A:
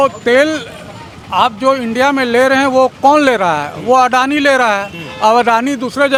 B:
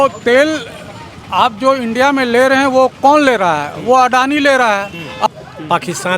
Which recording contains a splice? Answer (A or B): B